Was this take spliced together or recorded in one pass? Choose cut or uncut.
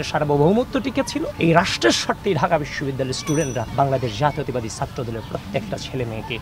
cut